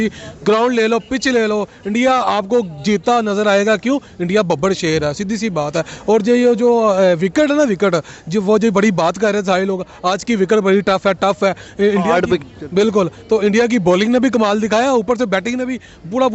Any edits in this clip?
no; 0 cuts

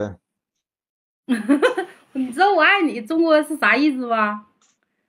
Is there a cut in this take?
no; 0 cuts

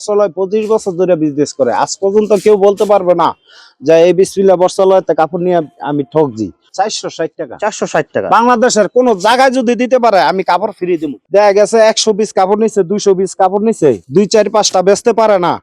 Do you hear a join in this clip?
yes; 2 cuts; at 6.6 s, 11.1 s

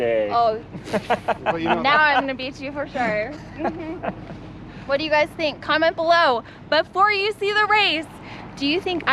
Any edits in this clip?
no; 0 cuts

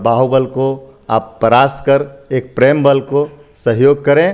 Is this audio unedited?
yes; 0 cuts

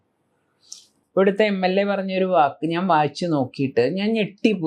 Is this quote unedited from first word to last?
no; 1 cut; at 0.9 s

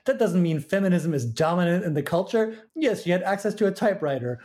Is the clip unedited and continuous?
no; 1 cut; at 2.6 s

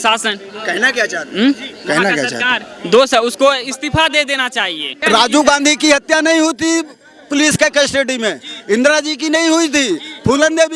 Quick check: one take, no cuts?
no; 1 cut; at 5.0 s

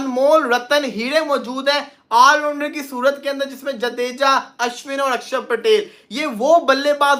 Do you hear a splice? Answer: no; 0 cuts

